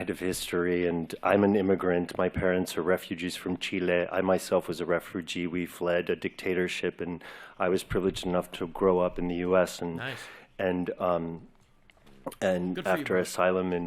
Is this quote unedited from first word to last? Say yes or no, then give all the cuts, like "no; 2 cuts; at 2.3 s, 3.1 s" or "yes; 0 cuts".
no; 2 cuts; at 0.9 s, 3.7 s